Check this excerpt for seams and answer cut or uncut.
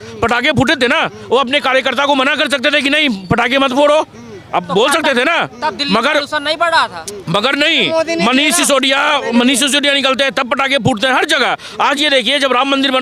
uncut